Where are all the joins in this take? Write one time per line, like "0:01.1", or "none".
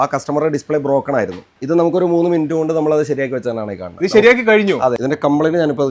0:01.5
0:05.0